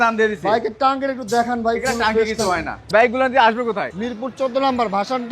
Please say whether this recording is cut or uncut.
cut